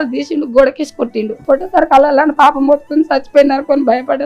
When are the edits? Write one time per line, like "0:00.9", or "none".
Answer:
0:01.3